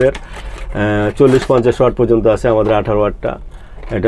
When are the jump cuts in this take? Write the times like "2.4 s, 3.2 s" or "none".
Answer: none